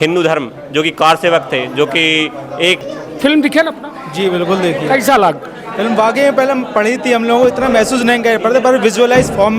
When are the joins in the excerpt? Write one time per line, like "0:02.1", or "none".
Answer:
0:02.9